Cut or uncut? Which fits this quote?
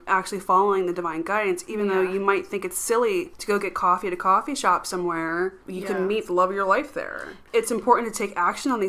cut